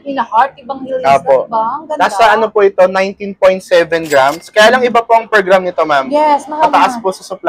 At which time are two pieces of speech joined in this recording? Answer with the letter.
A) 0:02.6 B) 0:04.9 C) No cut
C